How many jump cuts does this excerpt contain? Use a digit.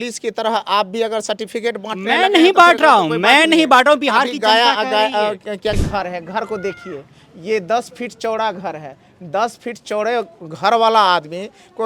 1